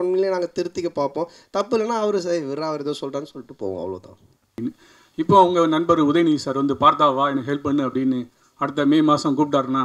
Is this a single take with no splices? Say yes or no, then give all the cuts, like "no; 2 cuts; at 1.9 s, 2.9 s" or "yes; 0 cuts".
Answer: no; 1 cut; at 4.5 s